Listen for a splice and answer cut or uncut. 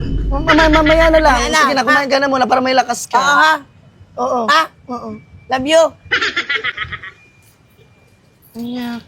uncut